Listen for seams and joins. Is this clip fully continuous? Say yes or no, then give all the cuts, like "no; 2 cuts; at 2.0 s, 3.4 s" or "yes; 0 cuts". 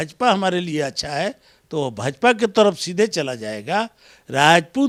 yes; 0 cuts